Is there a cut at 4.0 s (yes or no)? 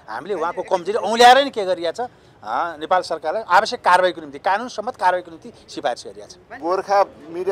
no